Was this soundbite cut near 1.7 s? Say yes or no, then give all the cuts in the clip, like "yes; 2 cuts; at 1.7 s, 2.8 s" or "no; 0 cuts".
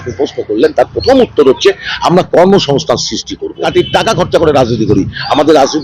no; 1 cut; at 3.7 s